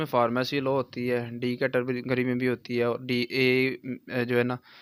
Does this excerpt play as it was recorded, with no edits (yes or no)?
yes